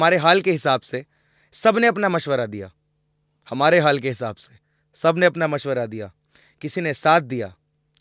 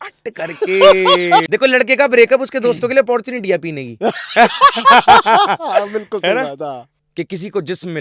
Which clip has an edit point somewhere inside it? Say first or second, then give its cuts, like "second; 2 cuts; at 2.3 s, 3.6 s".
second; 2 cuts; at 1.5 s, 6.9 s